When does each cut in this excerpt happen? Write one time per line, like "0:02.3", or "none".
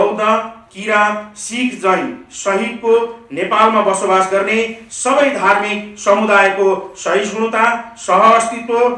none